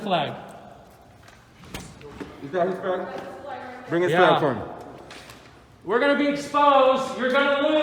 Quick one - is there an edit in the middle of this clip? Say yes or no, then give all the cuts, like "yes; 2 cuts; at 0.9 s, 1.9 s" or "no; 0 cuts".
no; 0 cuts